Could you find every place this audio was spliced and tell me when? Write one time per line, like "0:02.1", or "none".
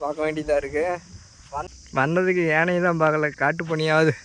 0:01.7